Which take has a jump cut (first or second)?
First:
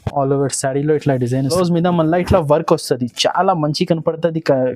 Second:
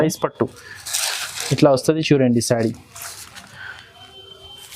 first